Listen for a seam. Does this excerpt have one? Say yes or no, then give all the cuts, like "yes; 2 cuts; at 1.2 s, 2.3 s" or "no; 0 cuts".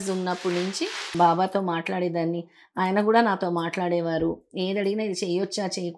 yes; 1 cut; at 1.1 s